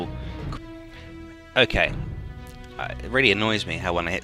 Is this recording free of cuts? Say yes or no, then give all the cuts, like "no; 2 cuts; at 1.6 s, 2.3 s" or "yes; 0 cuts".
yes; 0 cuts